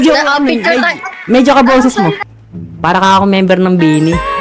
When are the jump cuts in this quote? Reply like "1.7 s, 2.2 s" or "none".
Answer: 2.3 s

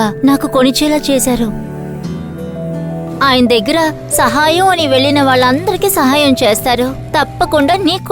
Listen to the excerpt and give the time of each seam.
3.0 s

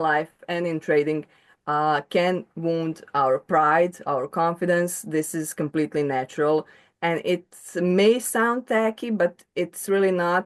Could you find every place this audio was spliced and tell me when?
none

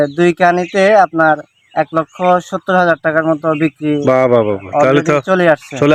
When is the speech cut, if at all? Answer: none

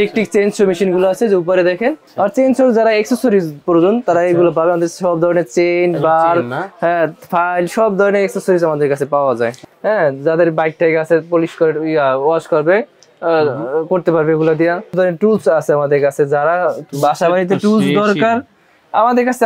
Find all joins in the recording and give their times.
2.0 s, 9.7 s, 15.0 s

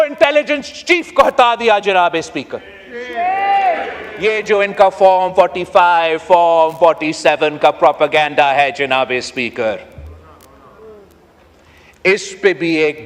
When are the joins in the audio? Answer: 4.0 s

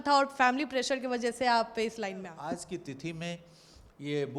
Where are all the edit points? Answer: 2.3 s

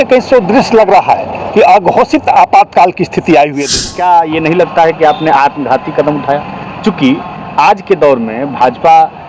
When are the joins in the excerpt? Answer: 3.8 s

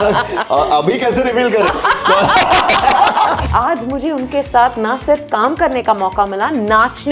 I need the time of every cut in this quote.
3.4 s

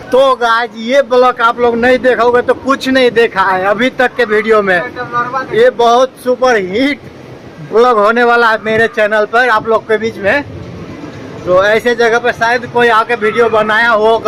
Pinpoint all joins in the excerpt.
none

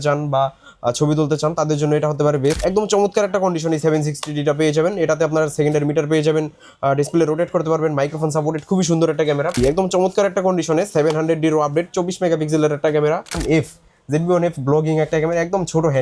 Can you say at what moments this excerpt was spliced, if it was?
2.6 s, 9.6 s, 13.4 s

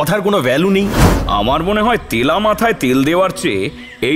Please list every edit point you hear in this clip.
1.0 s

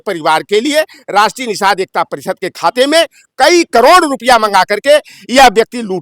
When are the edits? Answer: none

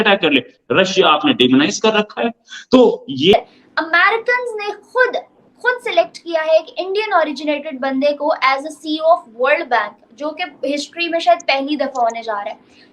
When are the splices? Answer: 3.3 s

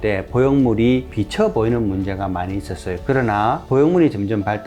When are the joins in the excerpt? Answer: 2.9 s

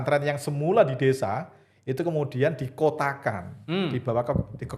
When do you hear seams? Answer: none

